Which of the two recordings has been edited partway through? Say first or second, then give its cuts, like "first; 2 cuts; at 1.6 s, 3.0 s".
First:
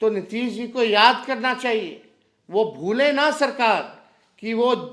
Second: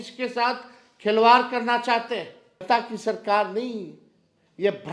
second; 1 cut; at 2.6 s